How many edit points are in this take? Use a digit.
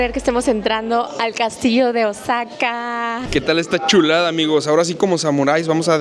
1